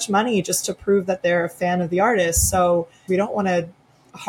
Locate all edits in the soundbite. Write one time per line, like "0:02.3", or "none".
0:03.0